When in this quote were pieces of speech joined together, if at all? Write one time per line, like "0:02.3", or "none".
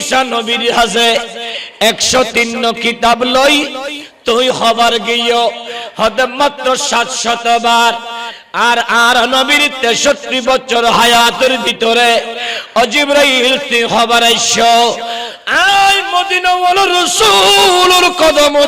none